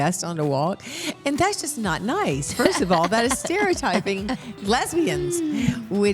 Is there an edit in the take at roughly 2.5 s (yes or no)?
no